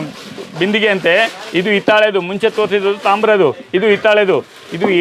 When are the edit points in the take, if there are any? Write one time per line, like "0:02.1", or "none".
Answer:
none